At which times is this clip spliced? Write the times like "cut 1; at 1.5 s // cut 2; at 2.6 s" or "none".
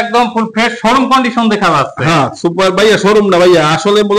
none